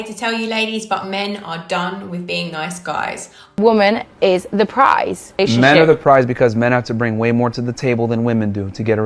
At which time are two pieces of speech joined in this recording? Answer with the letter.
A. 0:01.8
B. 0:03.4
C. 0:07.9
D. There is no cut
B